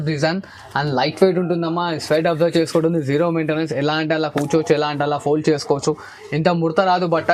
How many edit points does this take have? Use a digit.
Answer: 0